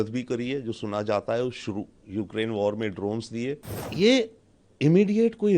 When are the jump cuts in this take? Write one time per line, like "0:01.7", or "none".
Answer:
0:03.8